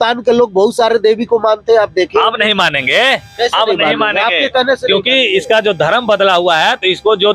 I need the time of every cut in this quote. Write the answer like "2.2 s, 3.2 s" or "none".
none